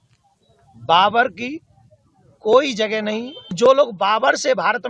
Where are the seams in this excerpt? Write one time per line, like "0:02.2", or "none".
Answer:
0:03.5

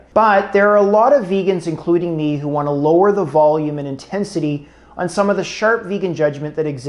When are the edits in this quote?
none

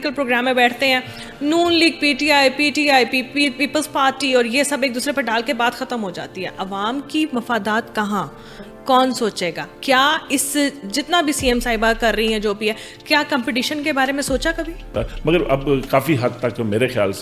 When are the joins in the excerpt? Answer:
0:14.9

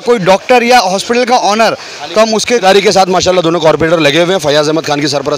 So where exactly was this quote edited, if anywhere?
0:02.6

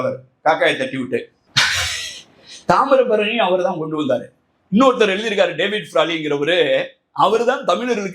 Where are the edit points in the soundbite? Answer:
0:01.4

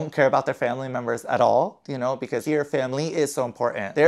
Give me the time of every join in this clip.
0:02.4

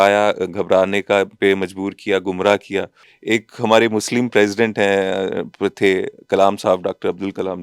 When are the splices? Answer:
0:03.0

